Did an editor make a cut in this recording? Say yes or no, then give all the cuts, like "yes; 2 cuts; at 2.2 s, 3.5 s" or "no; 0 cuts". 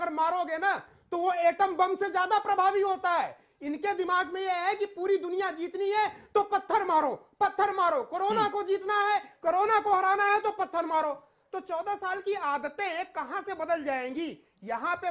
no; 0 cuts